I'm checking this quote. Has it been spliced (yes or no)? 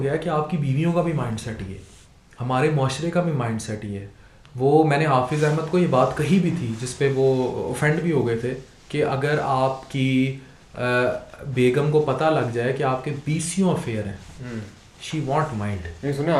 no